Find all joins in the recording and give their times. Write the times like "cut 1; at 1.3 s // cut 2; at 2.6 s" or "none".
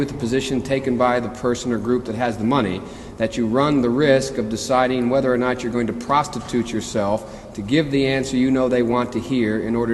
none